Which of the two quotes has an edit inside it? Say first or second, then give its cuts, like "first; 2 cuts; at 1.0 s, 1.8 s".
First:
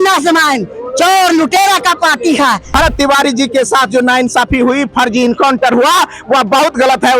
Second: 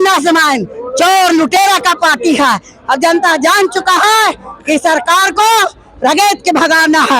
first; 1 cut; at 2.7 s